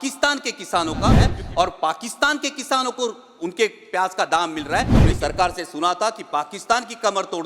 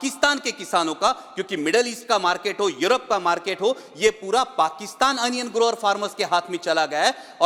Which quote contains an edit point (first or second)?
first